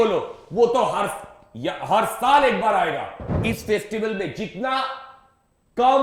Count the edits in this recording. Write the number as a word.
one